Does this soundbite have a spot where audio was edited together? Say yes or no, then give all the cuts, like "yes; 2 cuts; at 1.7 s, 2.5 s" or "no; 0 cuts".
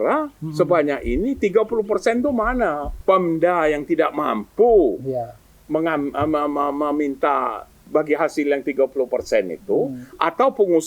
yes; 2 cuts; at 2.9 s, 7.8 s